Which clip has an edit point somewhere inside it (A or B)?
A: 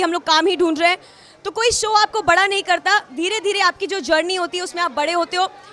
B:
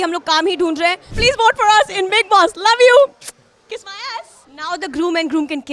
B